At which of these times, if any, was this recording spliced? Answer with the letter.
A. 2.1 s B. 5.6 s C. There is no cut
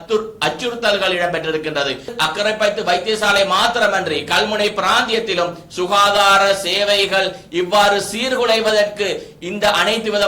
A